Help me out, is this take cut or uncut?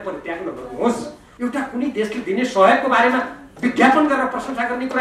cut